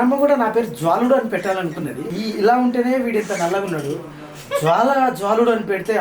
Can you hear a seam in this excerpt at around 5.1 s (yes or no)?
no